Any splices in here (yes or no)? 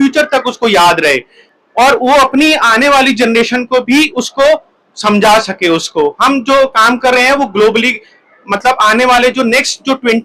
no